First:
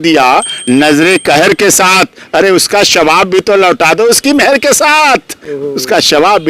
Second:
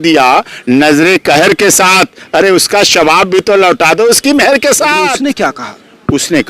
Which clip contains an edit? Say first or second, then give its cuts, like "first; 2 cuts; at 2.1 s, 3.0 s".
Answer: second; 1 cut; at 5.6 s